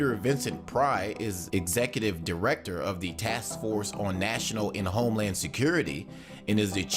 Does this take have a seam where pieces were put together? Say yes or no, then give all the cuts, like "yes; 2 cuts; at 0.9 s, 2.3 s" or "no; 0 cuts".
yes; 1 cut; at 1.5 s